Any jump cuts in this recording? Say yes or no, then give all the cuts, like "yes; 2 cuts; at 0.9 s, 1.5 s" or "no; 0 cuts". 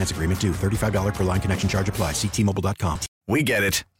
yes; 1 cut; at 3.1 s